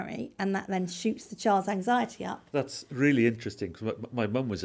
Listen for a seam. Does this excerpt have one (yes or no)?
no